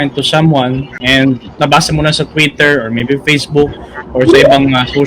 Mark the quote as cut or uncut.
cut